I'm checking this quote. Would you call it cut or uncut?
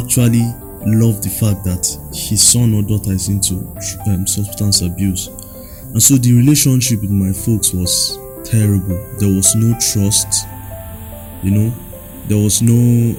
uncut